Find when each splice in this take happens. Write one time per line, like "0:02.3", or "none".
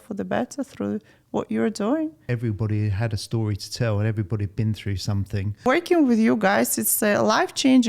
0:02.2
0:05.6